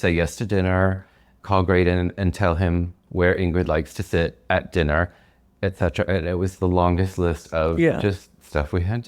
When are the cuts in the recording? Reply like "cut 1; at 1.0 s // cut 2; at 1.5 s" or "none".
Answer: none